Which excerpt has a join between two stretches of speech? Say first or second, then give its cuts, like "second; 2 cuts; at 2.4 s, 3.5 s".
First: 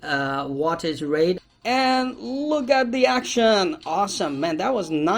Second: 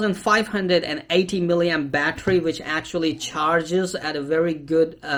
first; 1 cut; at 1.4 s